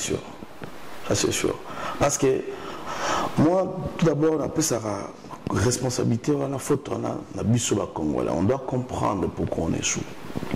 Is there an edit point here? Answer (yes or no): no